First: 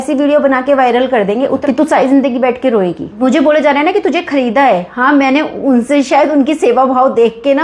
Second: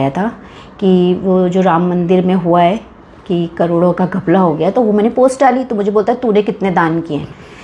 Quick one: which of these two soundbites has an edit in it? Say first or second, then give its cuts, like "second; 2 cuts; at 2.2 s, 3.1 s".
first; 2 cuts; at 1.6 s, 3.1 s